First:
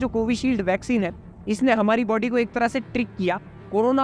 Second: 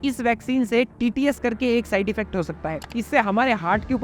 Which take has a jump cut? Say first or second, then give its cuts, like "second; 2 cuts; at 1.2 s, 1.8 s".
second; 1 cut; at 2.9 s